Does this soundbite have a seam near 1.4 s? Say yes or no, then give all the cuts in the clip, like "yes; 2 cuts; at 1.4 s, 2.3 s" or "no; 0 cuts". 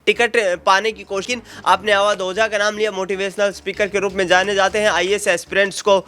yes; 1 cut; at 1.4 s